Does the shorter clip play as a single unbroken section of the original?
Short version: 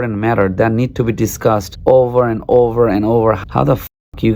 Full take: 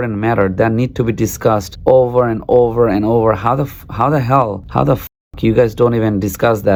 no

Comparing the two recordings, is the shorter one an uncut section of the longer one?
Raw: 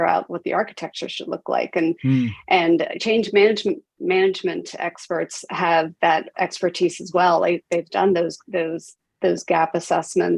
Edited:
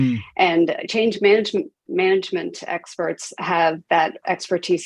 yes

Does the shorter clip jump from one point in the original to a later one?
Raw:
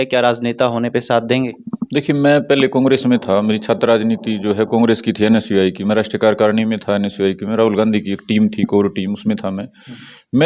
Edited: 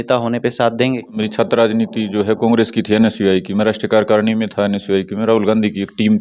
yes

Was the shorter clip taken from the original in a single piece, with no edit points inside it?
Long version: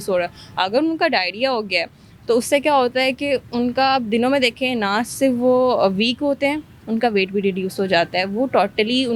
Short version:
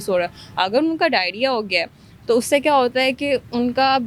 yes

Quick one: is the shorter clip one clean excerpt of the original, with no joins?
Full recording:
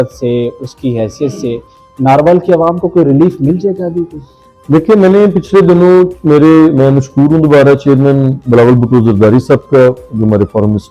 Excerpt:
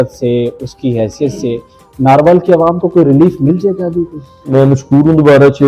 no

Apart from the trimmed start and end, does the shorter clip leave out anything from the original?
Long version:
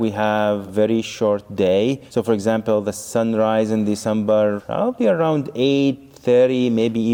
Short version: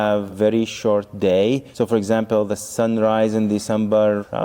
no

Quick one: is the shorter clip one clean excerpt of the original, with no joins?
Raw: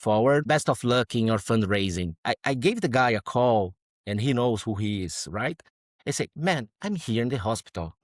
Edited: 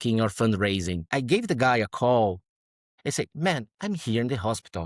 no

